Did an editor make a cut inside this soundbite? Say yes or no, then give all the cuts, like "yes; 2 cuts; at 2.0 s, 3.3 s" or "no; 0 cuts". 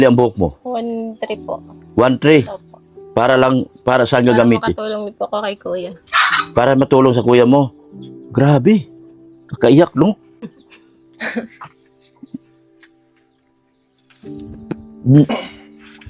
no; 0 cuts